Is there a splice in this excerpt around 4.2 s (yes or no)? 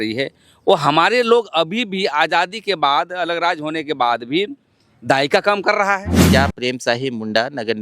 no